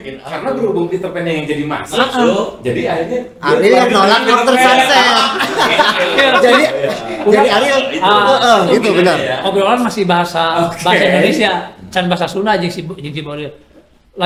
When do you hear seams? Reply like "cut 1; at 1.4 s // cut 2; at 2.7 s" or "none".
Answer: none